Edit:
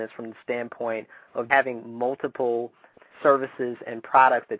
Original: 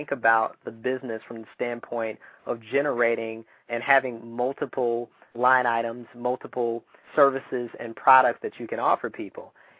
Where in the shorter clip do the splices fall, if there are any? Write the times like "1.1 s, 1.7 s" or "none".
1.5 s, 2.9 s